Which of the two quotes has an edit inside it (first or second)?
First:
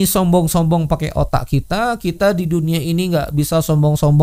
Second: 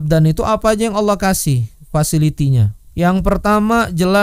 second